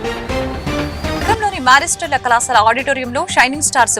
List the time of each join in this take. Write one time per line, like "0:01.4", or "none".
0:01.2